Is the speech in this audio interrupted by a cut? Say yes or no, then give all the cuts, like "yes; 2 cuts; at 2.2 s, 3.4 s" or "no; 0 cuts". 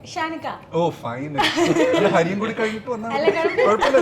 no; 0 cuts